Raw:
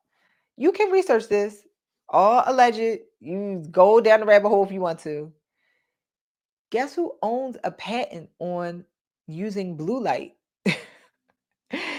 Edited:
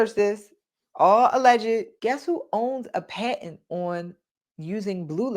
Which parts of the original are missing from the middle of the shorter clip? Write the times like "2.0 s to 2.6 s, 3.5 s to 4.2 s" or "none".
3.1 s to 6.6 s